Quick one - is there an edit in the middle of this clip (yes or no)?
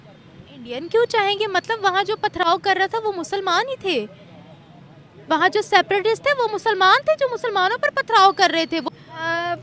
no